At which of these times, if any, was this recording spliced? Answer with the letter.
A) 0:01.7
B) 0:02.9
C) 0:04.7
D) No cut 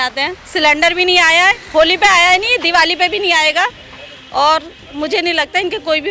D